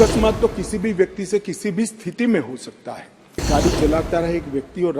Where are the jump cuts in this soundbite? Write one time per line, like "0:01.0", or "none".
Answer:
0:03.4